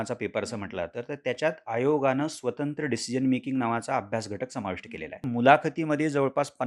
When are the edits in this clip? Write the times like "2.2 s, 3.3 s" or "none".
5.2 s